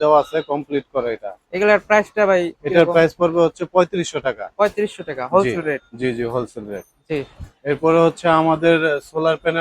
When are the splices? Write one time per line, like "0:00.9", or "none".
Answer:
none